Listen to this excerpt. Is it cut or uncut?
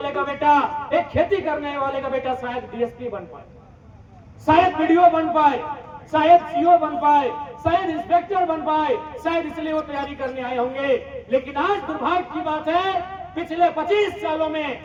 uncut